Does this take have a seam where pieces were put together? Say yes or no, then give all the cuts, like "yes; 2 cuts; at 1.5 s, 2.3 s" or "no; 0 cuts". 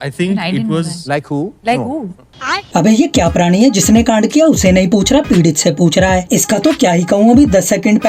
no; 0 cuts